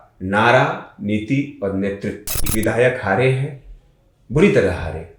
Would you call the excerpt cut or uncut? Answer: cut